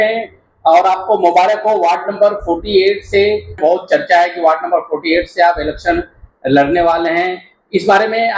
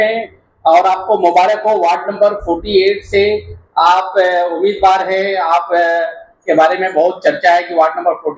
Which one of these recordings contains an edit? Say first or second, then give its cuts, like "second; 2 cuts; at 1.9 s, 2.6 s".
first; 1 cut; at 3.5 s